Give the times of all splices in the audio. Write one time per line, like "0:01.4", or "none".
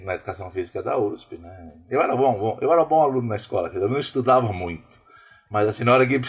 none